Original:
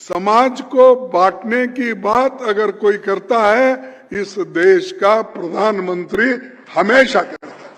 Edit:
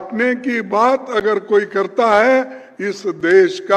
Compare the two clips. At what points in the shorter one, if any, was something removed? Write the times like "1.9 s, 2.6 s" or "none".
none